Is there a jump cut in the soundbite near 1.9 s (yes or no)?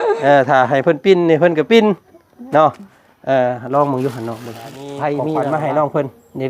no